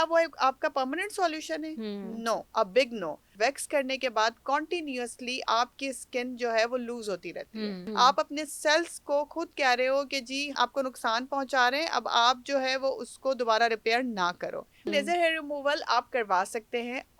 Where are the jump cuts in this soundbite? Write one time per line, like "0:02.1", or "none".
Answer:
0:03.3
0:07.8
0:14.9